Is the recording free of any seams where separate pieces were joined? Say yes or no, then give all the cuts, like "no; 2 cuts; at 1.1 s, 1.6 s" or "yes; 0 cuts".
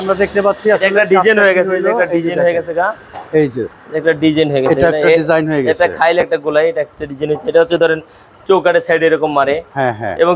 yes; 0 cuts